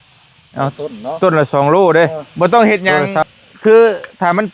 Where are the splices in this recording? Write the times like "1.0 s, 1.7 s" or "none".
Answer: 2.2 s